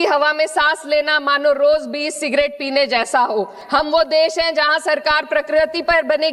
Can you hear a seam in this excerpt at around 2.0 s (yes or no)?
no